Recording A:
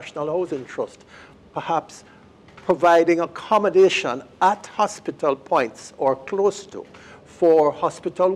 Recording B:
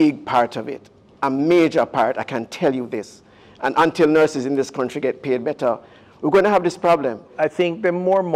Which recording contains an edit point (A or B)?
B